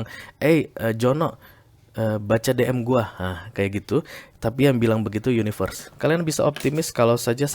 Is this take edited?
yes; 1 cut; at 5.8 s

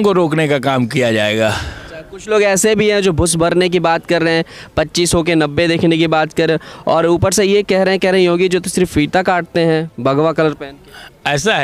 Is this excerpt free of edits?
yes; 0 cuts

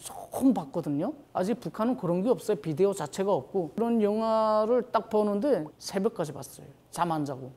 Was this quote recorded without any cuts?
no; 1 cut; at 3.8 s

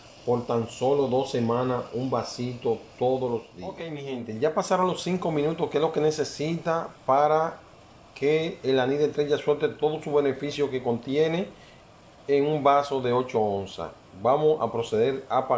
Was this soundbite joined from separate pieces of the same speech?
yes; 1 cut; at 3.9 s

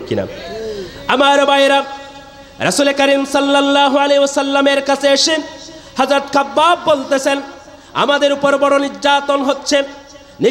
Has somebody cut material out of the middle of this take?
no; 0 cuts

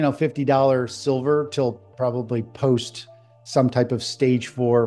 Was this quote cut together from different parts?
no; 0 cuts

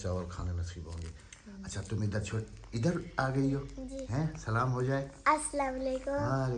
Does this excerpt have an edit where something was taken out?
no; 0 cuts

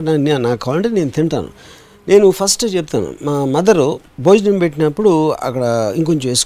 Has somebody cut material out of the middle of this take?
no; 0 cuts

